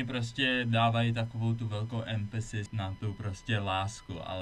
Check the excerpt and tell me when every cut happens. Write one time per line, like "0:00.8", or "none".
0:02.7